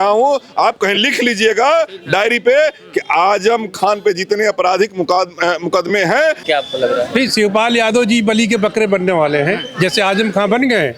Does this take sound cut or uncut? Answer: cut